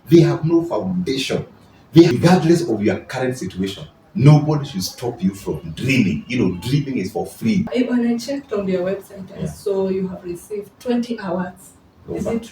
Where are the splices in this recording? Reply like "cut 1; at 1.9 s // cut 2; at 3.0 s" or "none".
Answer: cut 1; at 2.1 s // cut 2; at 7.7 s